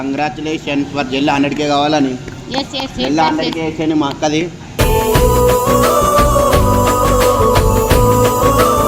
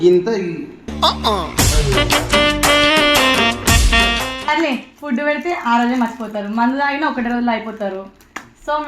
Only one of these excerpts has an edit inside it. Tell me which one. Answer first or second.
second